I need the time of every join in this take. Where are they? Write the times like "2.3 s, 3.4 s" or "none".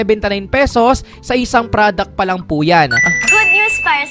3.1 s